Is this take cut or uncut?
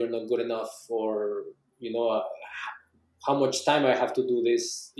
uncut